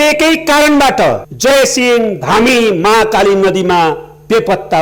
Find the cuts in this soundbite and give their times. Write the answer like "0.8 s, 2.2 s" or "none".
1.3 s